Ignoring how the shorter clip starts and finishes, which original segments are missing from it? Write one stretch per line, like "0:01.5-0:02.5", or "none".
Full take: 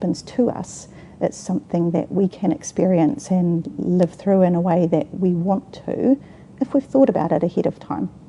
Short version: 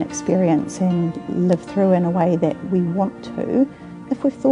none